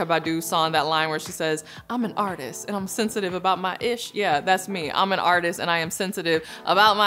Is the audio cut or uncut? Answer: uncut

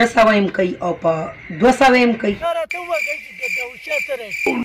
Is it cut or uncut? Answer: cut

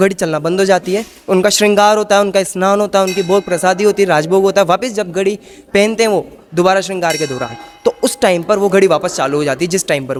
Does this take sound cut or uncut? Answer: uncut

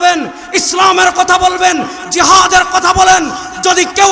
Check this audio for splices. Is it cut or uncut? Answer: uncut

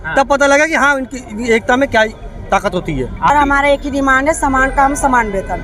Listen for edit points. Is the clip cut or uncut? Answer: cut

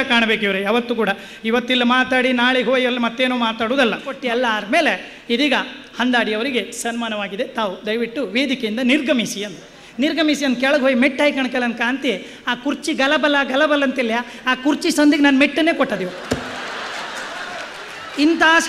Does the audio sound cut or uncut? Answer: cut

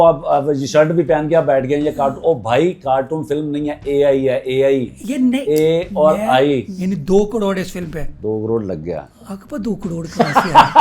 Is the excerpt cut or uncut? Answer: cut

